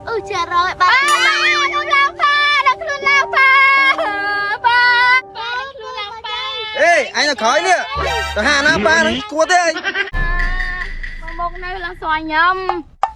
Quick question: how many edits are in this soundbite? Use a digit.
1